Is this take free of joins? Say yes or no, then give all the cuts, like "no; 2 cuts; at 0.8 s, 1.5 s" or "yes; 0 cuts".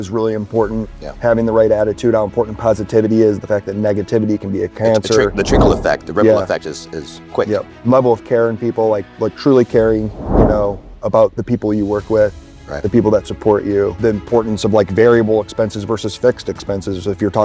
no; 2 cuts; at 1.0 s, 13.9 s